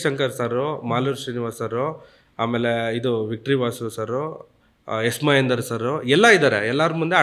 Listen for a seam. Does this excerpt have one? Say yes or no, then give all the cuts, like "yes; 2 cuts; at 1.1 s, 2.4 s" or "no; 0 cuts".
no; 0 cuts